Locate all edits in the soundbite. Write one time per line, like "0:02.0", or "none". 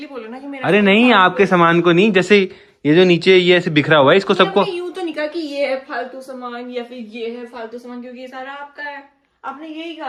none